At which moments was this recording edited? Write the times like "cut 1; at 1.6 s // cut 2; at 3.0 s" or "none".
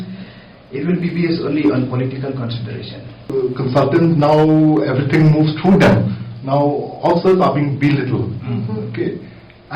cut 1; at 3.3 s